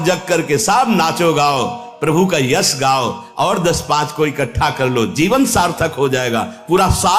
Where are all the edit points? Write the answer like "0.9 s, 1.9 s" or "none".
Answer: none